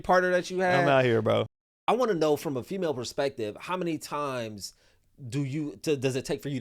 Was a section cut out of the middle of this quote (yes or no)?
yes